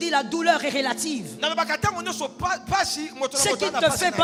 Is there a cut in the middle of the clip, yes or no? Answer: no